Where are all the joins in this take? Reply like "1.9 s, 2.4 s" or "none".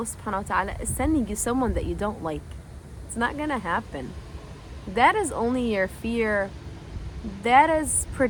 none